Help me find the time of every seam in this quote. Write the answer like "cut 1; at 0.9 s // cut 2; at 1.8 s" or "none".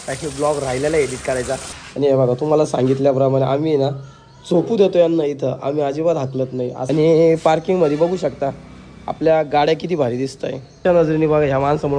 cut 1; at 1.8 s // cut 2; at 6.8 s // cut 3; at 10.7 s